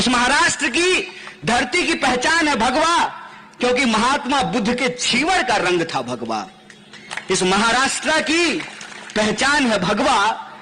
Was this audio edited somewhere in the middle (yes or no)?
no